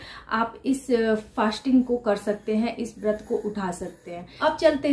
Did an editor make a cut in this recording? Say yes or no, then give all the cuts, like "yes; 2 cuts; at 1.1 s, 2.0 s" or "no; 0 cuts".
no; 0 cuts